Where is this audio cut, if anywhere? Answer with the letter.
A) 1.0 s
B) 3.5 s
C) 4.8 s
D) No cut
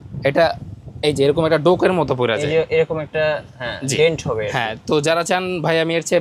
D